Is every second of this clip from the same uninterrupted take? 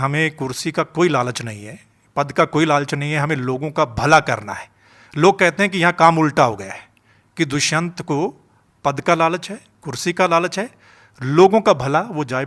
yes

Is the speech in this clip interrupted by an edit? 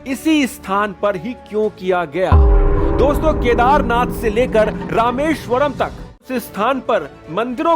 yes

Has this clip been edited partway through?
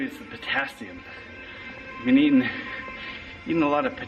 no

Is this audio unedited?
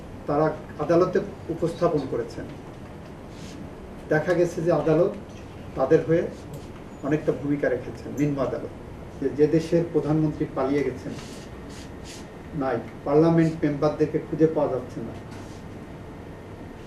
no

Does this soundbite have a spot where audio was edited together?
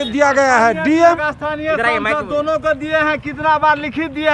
yes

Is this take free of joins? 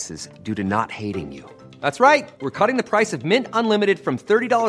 yes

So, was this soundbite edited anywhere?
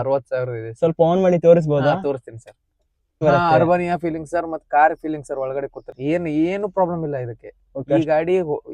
yes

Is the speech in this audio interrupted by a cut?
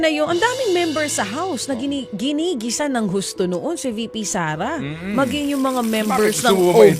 no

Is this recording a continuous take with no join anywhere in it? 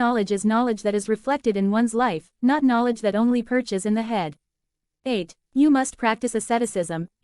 no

